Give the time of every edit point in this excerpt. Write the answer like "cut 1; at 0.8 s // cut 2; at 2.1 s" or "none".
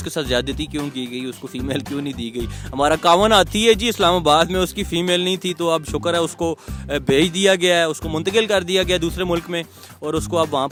none